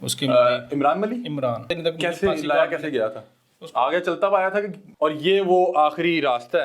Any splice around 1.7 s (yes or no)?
yes